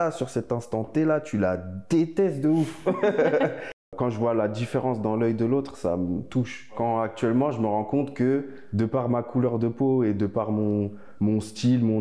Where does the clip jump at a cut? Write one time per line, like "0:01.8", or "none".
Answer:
0:03.9